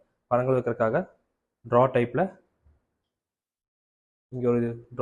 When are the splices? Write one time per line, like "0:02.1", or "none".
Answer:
none